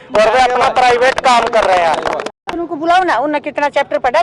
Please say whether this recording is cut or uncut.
cut